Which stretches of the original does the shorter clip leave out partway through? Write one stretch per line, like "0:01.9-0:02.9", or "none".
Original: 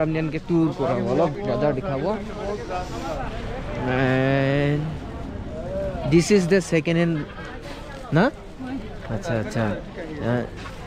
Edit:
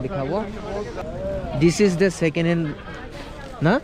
0:02.7-0:05.5

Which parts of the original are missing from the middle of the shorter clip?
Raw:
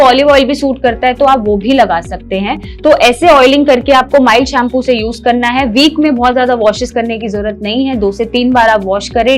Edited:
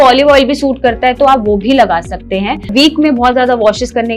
0:02.7-0:05.7

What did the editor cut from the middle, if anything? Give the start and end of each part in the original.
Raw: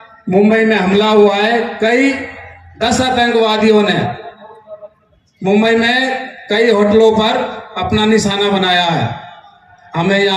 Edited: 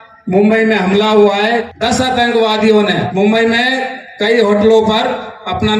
0:01.7-0:02.7
0:04.1-0:05.4

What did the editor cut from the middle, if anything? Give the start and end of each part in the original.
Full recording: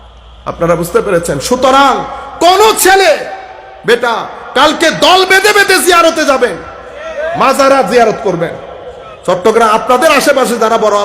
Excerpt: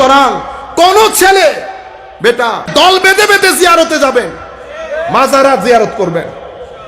0:04.3-0:05.0

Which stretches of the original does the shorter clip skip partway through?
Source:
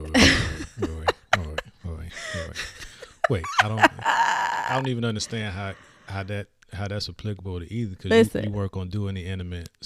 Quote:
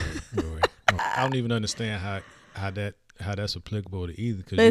0:01.4-0:04.5

